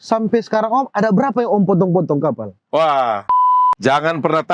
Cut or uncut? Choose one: cut